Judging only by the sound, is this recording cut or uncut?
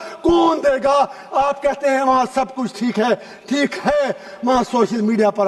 uncut